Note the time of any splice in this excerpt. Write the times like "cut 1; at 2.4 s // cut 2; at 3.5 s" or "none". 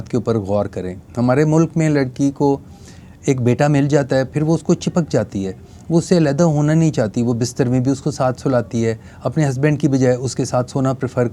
none